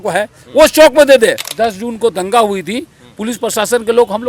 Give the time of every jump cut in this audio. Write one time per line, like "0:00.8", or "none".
0:01.5